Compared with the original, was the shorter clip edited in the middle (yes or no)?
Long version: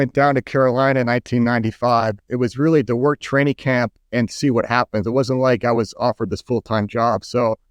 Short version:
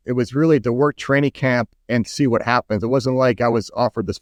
no